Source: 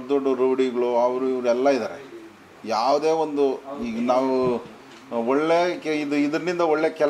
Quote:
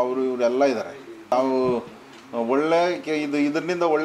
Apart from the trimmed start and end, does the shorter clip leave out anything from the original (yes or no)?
yes